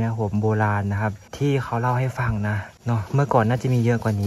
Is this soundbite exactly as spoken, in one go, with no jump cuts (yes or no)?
no